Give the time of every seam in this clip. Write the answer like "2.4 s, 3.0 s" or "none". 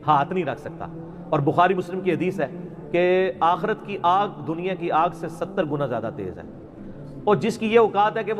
none

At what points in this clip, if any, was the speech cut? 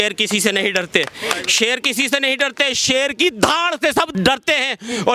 4.1 s

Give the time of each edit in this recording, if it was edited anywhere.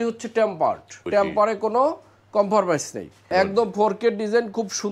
0.9 s, 3.2 s

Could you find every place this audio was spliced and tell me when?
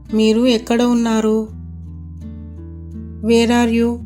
none

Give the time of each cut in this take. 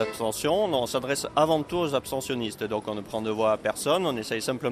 none

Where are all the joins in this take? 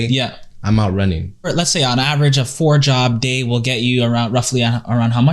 1.5 s

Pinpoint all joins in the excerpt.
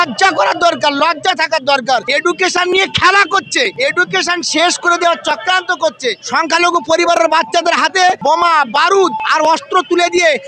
2.1 s, 3.7 s, 6.2 s, 8.2 s, 9.2 s

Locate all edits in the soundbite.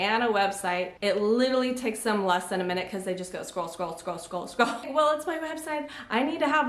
0.9 s, 4.9 s

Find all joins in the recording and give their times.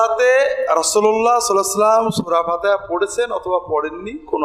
none

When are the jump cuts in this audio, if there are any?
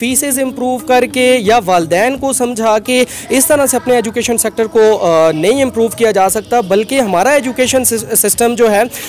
none

